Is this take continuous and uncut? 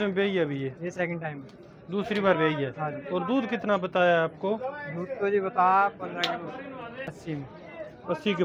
no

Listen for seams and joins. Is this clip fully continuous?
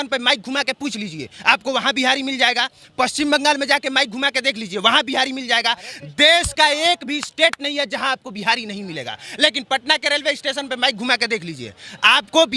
yes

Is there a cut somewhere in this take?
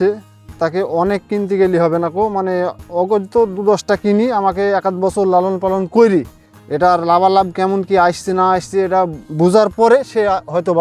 no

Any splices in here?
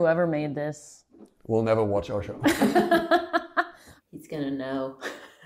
yes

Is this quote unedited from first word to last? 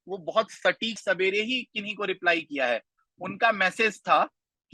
no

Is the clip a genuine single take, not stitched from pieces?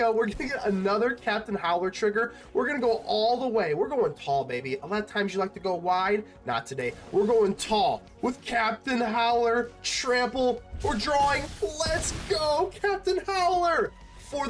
yes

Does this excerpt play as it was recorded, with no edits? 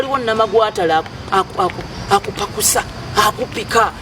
no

